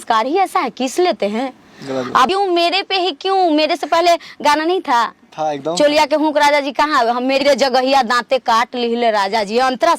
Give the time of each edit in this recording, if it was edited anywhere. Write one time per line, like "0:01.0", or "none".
0:02.3
0:07.4